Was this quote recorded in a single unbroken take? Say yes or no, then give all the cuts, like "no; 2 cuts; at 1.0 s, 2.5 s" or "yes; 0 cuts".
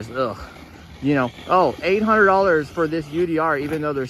yes; 0 cuts